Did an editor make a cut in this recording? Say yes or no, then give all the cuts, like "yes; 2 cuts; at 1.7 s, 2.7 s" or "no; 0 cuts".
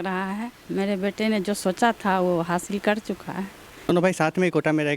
yes; 1 cut; at 3.9 s